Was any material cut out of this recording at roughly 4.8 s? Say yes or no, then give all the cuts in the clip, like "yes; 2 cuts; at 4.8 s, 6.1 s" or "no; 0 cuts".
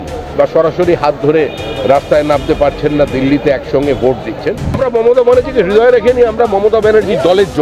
yes; 1 cut; at 4.8 s